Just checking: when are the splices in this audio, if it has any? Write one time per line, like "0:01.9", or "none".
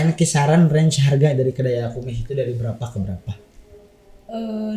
none